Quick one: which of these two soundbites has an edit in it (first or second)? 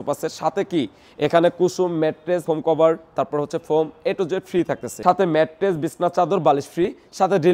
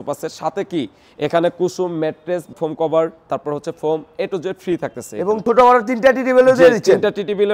first